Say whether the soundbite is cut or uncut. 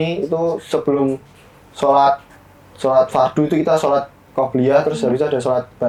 uncut